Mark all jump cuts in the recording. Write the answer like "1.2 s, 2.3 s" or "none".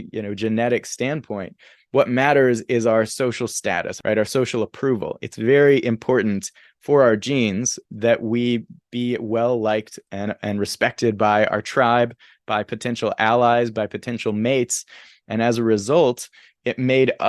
3.9 s, 7.8 s